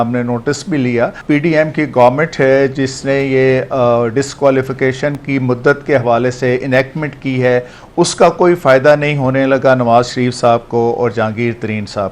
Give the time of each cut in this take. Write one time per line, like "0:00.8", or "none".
0:01.2